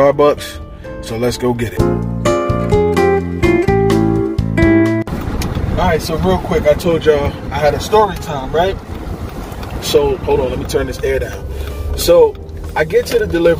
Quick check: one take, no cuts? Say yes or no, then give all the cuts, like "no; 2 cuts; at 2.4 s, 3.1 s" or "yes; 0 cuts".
yes; 0 cuts